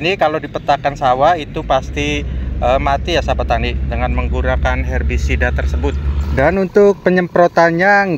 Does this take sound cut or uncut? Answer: cut